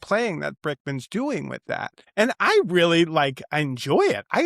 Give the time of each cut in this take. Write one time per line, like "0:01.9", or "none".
0:02.0